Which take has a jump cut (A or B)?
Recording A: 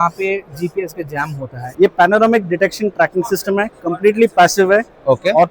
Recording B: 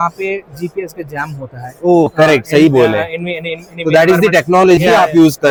A